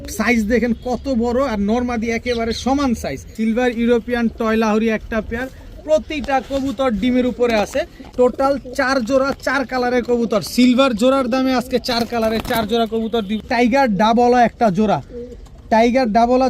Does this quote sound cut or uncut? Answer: cut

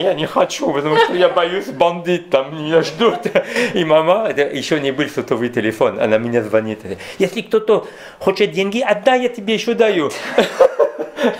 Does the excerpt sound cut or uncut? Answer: uncut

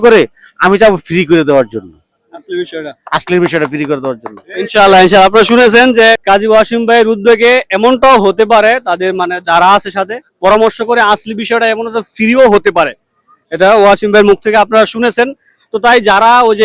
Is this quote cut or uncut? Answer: cut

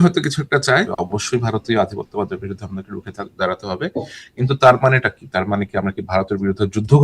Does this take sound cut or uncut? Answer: cut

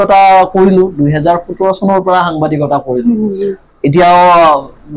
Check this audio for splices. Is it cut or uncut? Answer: uncut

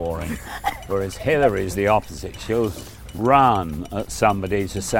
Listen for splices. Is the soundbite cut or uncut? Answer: cut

